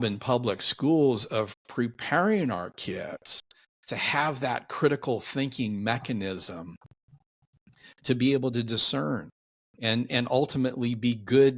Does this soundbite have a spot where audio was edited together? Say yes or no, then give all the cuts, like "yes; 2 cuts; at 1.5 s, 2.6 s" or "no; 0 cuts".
no; 0 cuts